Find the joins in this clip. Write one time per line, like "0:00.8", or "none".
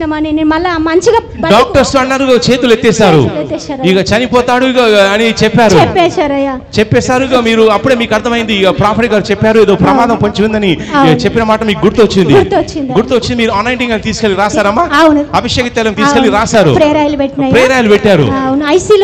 none